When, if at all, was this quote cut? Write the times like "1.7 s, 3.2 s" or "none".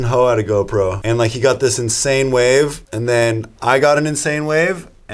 1.0 s, 2.9 s